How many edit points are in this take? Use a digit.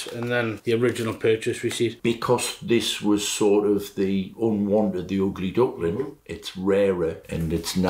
1